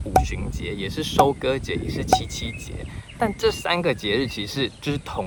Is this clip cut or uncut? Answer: uncut